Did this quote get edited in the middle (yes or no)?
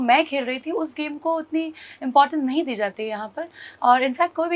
no